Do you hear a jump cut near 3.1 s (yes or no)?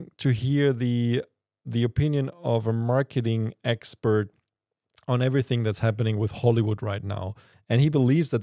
no